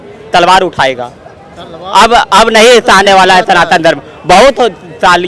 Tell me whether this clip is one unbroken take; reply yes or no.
yes